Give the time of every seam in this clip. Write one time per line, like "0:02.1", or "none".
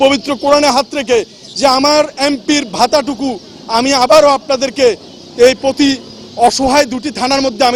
none